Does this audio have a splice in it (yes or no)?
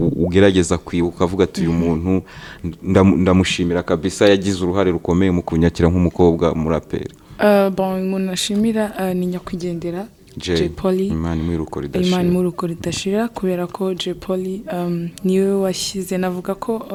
no